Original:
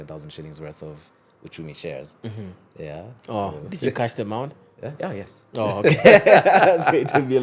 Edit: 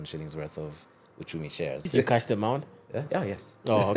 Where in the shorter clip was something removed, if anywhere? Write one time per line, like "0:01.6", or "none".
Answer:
0:01.9